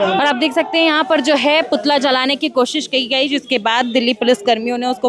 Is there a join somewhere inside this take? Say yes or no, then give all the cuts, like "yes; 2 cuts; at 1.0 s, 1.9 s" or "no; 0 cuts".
no; 0 cuts